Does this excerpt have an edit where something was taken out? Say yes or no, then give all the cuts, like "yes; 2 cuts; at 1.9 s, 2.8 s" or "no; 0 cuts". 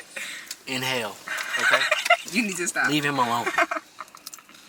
no; 0 cuts